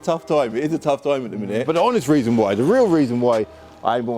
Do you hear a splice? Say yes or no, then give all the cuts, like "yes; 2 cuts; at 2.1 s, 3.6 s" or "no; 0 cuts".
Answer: yes; 1 cut; at 1.7 s